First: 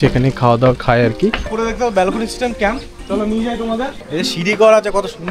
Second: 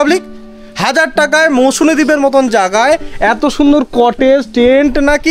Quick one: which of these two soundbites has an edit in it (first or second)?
first